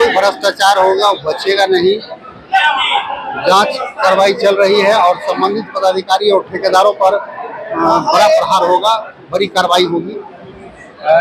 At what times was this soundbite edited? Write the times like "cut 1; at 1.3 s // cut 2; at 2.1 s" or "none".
none